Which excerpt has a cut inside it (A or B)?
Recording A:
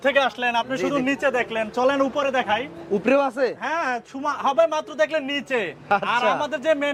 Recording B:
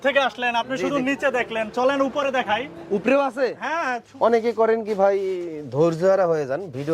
B